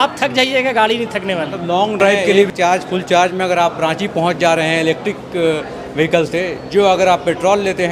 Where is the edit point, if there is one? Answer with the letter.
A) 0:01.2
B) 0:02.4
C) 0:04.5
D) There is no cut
B